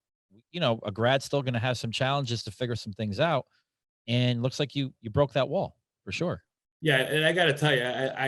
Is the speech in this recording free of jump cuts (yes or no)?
yes